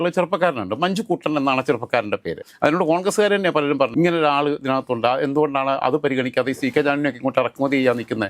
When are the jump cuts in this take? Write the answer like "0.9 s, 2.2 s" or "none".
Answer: none